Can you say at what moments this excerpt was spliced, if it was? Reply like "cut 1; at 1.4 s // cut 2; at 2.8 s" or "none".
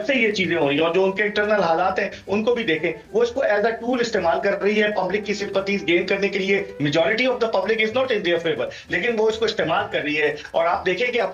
none